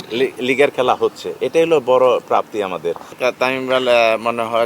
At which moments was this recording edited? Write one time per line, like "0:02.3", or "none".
0:03.1